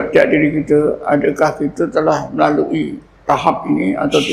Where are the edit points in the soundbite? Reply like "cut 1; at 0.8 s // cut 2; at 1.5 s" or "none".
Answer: cut 1; at 3.1 s